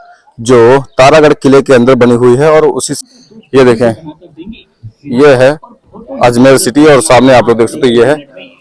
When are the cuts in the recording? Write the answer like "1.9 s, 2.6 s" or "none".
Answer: 2.9 s